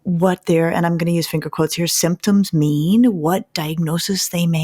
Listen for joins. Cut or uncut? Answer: uncut